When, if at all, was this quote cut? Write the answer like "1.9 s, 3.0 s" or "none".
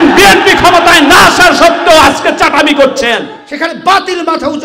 3.4 s